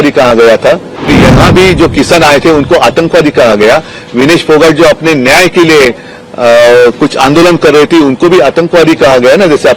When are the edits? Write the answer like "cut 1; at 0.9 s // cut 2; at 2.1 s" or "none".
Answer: cut 1; at 1.1 s